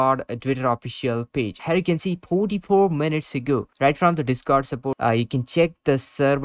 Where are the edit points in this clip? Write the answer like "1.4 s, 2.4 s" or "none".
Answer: 1.6 s, 5.0 s